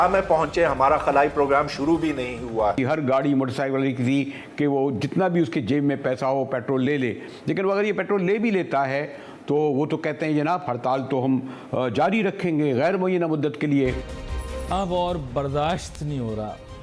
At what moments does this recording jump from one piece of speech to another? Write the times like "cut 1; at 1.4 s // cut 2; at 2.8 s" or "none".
cut 1; at 2.8 s // cut 2; at 14.3 s